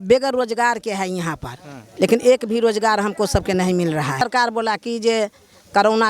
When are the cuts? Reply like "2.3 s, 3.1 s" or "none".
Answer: 4.2 s